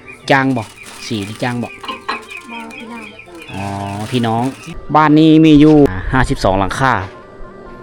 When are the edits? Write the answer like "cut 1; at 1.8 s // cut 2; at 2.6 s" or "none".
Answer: cut 1; at 4.7 s // cut 2; at 5.9 s

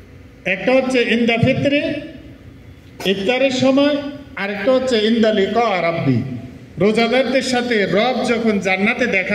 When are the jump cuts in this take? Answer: none

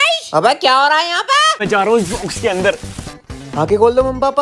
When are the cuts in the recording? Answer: cut 1; at 1.5 s

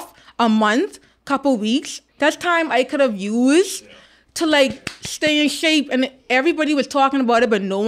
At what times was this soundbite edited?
cut 1; at 2.0 s

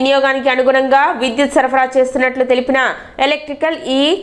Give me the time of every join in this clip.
none

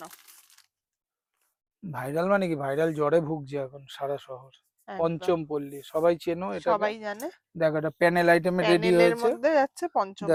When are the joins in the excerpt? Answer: none

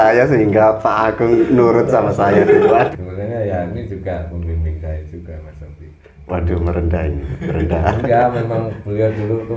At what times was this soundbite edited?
cut 1; at 2.9 s

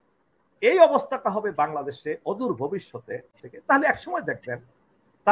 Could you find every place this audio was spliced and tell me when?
cut 1; at 3.3 s

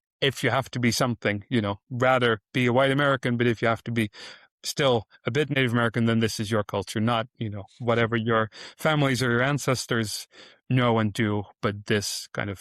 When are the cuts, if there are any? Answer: cut 1; at 5.6 s

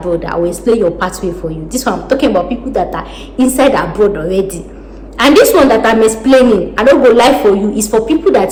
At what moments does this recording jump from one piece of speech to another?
none

